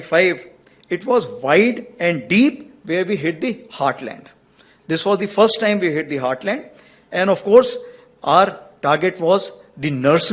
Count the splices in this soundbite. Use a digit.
0